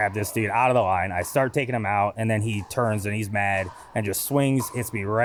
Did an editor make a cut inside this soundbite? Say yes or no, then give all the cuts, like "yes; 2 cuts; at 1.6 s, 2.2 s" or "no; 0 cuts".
no; 0 cuts